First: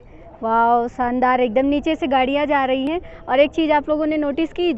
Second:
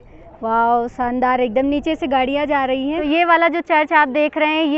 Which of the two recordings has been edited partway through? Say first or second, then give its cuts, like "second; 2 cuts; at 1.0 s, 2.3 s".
second; 1 cut; at 2.9 s